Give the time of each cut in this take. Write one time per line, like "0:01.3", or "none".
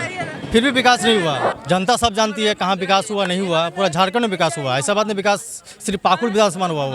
0:01.5

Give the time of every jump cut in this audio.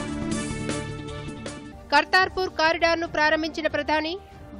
none

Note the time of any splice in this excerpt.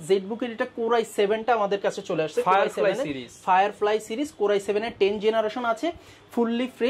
none

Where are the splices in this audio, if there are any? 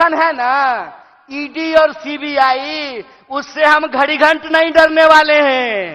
none

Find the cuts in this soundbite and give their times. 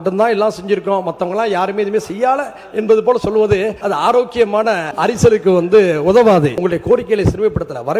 0:03.8
0:04.9
0:06.5

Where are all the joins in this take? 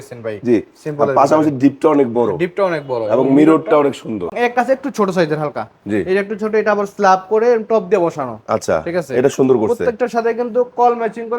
0:04.3

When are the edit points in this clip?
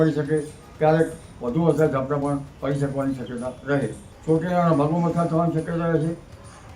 0:04.1

